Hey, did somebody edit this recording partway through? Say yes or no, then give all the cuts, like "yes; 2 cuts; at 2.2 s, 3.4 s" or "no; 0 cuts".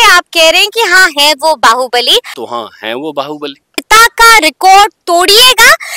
yes; 2 cuts; at 2.4 s, 3.8 s